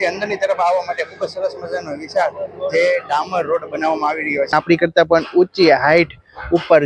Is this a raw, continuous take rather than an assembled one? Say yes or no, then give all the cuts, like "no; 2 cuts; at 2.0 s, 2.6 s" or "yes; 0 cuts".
no; 1 cut; at 4.5 s